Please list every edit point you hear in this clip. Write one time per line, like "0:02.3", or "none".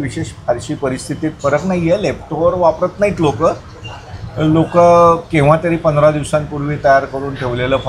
none